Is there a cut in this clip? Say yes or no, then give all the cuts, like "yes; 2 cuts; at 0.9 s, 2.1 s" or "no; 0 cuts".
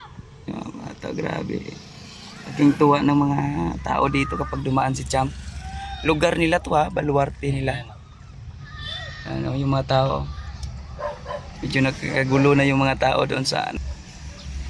yes; 1 cut; at 13.8 s